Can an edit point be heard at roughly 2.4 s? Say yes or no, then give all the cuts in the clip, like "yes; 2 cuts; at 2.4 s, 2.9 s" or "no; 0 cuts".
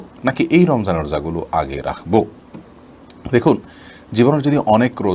no; 0 cuts